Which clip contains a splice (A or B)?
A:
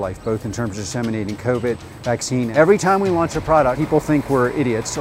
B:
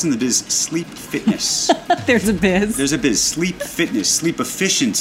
A